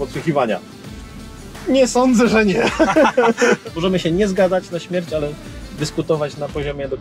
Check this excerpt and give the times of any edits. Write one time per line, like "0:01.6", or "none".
0:03.6